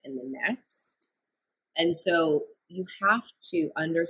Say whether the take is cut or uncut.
uncut